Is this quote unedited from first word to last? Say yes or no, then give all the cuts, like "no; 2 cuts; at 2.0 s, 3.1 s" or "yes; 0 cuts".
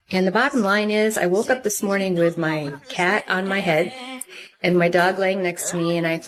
yes; 0 cuts